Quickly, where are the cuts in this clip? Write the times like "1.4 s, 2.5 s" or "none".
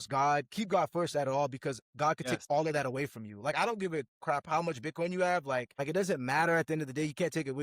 5.7 s